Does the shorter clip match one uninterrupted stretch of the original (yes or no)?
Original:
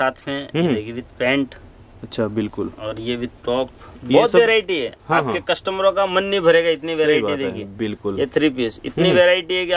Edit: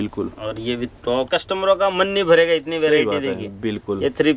no